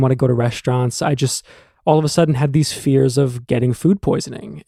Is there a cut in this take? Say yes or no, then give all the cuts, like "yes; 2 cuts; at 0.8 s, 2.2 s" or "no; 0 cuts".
no; 0 cuts